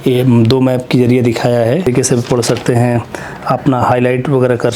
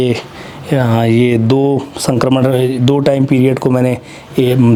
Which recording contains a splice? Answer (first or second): first